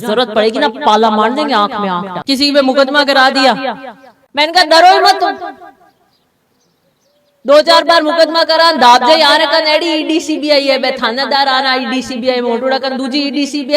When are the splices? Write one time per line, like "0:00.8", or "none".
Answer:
0:02.1